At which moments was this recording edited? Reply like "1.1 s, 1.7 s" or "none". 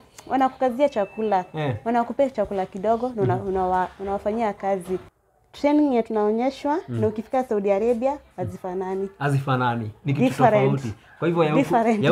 5.1 s

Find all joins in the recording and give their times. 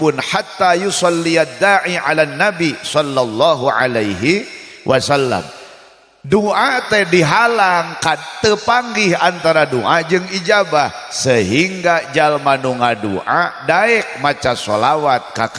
none

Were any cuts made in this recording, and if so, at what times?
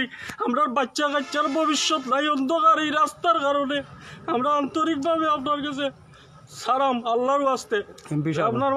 none

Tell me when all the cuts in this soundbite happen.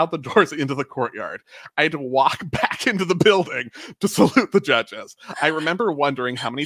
none

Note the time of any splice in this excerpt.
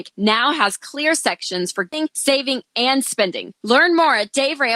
1.9 s

